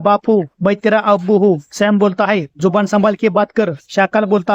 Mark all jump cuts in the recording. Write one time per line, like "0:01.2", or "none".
none